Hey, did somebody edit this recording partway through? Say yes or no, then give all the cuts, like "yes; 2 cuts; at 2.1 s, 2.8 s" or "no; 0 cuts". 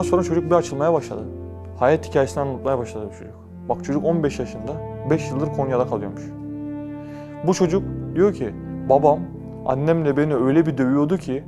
no; 0 cuts